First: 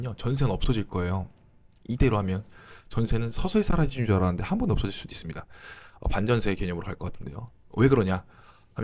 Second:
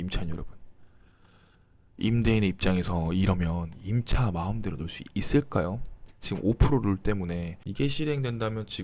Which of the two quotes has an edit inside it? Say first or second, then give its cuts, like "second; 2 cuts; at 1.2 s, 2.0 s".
second; 1 cut; at 7.6 s